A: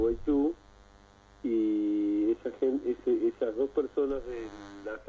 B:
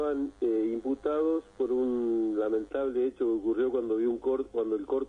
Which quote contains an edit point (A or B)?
B